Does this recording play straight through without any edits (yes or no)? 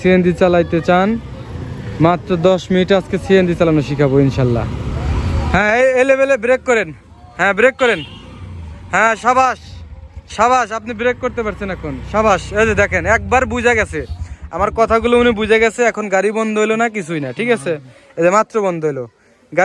yes